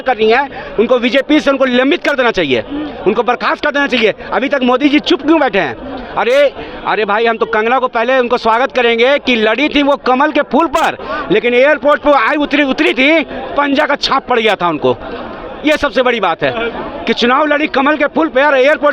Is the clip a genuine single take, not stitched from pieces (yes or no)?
yes